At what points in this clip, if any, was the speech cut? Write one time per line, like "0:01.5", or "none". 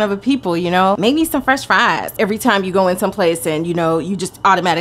0:01.0
0:02.1